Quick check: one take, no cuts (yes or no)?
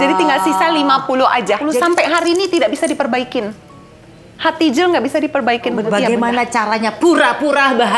no